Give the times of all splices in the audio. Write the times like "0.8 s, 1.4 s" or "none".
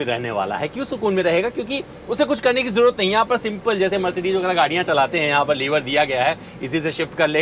none